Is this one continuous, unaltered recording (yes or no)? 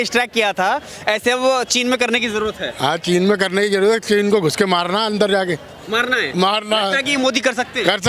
yes